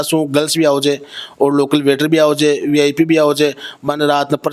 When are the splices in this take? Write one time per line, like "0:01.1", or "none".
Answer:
none